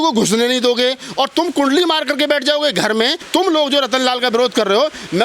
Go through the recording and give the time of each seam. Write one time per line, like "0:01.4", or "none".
0:03.2

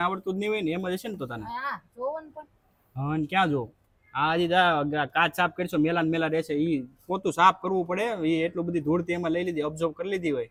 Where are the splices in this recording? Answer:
none

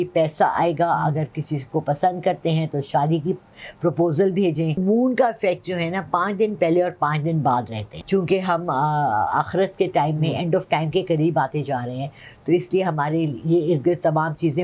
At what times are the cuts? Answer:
0:04.8
0:07.9

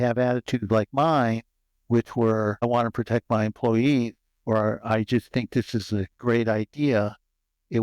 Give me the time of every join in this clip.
0:02.6

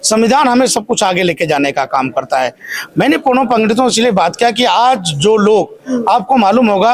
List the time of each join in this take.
none

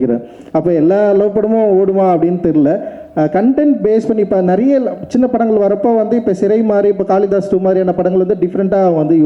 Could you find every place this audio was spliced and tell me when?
none

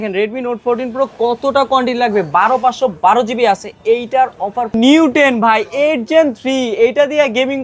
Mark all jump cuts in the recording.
0:04.7

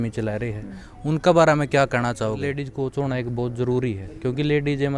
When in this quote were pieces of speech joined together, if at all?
0:02.7

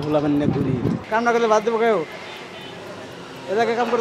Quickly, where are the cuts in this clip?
0:01.0

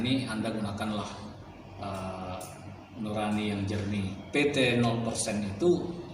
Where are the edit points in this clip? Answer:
0:04.1

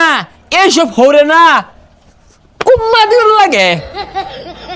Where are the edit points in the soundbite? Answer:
0:03.8

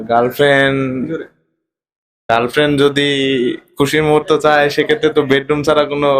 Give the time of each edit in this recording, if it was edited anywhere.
0:05.1

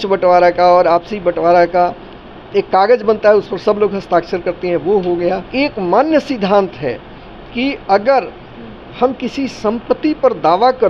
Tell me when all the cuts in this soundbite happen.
0:05.5

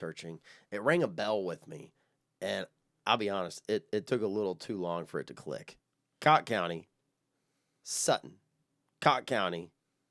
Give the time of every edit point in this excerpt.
0:05.7

